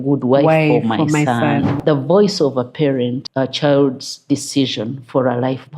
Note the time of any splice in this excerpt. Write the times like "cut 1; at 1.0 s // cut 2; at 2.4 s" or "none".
cut 1; at 1.8 s // cut 2; at 3.2 s